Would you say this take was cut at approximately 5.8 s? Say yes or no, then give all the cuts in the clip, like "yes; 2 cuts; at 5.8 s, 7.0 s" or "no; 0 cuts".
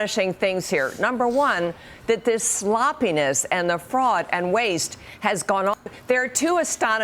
yes; 1 cut; at 5.8 s